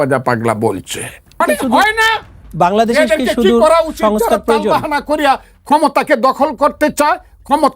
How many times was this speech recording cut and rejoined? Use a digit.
1